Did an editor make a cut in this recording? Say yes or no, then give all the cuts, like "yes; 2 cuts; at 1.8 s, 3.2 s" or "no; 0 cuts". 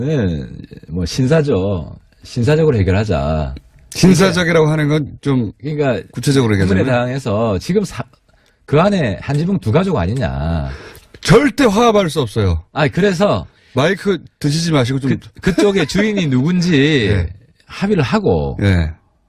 yes; 1 cut; at 11.2 s